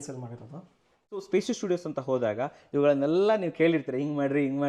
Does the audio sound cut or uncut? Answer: cut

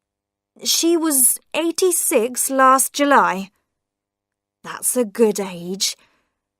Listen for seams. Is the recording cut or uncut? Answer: cut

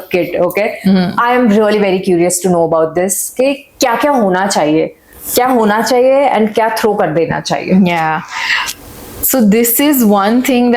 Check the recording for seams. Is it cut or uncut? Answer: uncut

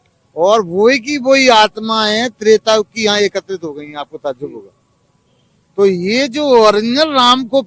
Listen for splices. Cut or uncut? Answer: uncut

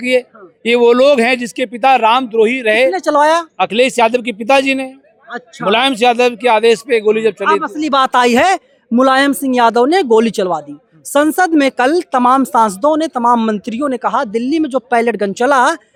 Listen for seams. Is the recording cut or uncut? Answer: uncut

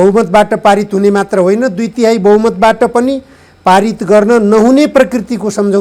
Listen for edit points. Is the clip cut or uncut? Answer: uncut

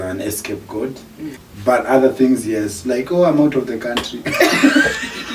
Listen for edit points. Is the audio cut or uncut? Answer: cut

